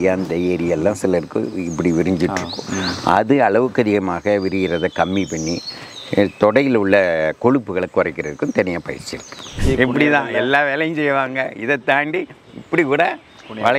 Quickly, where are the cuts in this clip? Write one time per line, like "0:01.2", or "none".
0:09.6